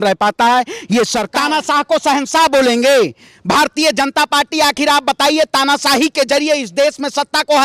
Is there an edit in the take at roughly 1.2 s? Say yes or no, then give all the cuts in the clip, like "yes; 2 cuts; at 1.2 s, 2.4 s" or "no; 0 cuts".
yes; 1 cut; at 1.2 s